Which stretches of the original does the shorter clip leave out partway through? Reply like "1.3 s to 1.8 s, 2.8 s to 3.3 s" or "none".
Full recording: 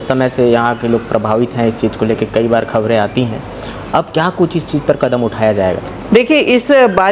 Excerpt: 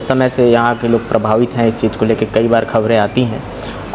none